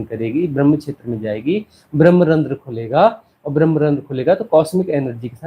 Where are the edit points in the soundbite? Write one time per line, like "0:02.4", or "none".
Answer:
none